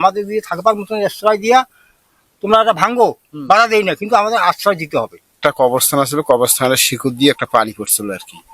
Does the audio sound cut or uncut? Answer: cut